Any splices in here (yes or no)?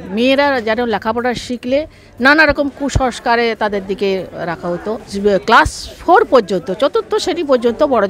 yes